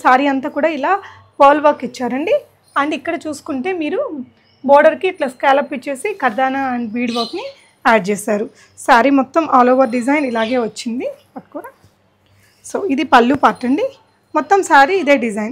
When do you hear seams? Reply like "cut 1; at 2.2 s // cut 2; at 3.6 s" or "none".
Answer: none